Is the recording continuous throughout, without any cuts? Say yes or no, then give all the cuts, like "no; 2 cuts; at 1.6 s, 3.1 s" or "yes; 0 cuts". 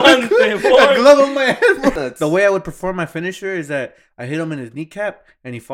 no; 1 cut; at 2.0 s